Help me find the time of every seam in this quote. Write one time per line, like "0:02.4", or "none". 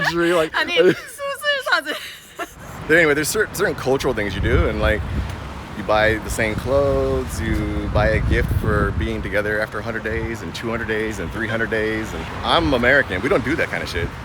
0:02.7
0:12.3